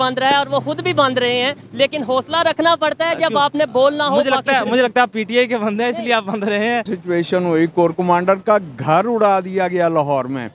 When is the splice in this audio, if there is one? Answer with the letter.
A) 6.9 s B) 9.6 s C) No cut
A